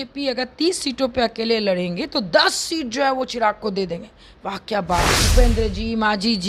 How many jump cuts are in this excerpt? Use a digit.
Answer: 1